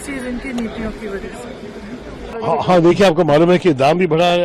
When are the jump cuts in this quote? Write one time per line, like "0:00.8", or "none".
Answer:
0:02.4